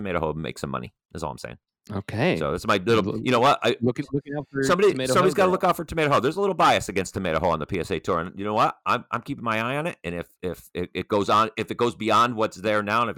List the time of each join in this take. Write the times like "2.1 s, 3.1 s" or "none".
1.7 s